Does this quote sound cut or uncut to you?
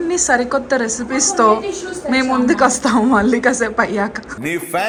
uncut